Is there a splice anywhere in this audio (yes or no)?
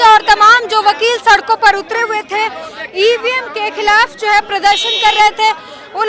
no